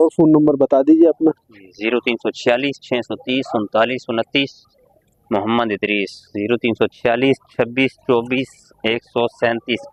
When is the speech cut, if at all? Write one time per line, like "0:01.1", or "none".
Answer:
none